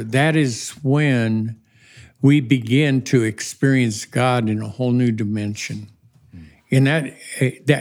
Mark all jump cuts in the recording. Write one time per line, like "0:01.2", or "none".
none